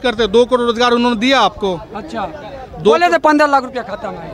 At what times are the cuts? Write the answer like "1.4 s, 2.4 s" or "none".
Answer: none